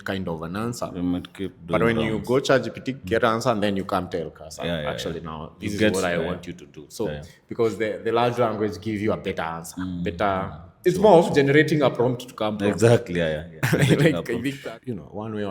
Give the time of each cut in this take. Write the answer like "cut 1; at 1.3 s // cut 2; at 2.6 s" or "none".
cut 1; at 14.6 s